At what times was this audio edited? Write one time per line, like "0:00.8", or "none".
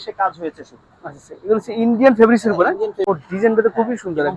0:03.1